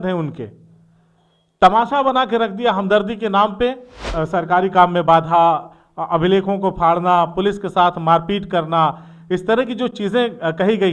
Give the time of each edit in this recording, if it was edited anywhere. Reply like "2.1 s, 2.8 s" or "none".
4.1 s

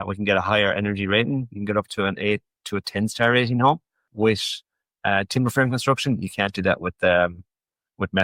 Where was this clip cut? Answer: 4.1 s

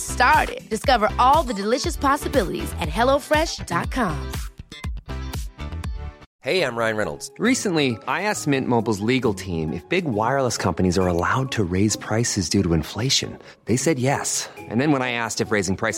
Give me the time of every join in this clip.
6.3 s

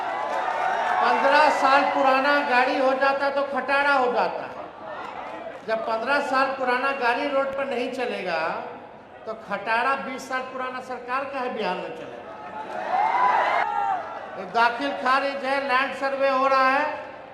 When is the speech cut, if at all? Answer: 5.1 s, 13.6 s

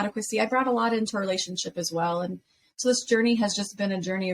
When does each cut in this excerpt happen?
none

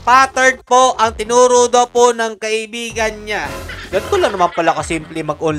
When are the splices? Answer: none

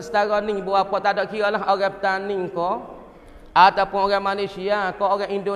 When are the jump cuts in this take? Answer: none

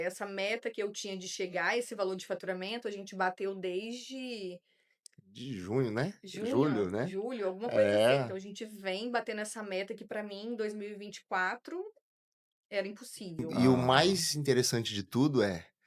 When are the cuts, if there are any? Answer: 13.5 s

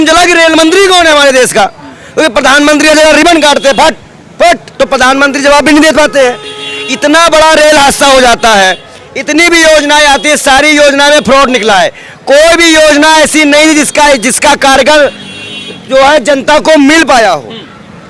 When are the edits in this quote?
none

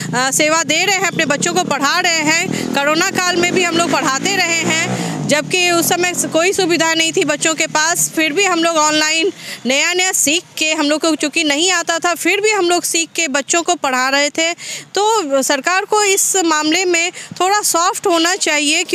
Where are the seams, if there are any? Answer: none

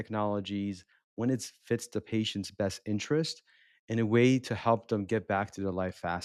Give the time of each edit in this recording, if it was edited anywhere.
none

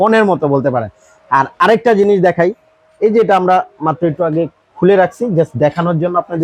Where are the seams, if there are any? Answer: none

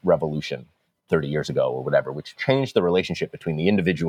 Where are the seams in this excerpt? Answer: 1.0 s, 2.2 s

